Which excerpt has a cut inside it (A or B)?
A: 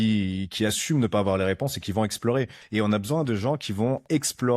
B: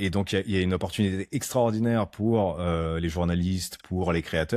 A